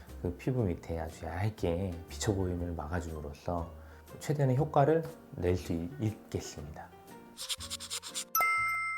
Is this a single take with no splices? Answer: yes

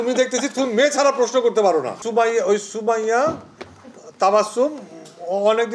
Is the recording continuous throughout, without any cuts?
yes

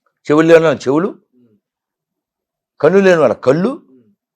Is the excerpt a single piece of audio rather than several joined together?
yes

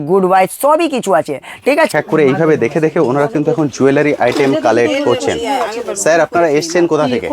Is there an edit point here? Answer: yes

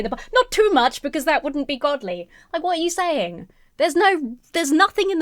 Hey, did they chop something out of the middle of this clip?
no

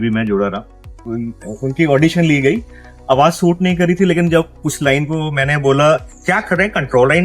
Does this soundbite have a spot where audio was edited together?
yes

